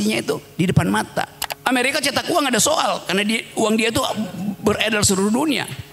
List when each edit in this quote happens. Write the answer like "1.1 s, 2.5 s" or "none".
1.4 s